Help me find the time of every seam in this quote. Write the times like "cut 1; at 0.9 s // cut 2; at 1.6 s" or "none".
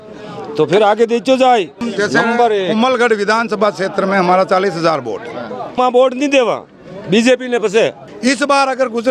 cut 1; at 1.8 s // cut 2; at 5.8 s // cut 3; at 8.0 s